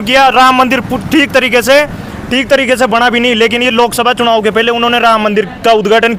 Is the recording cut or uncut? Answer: uncut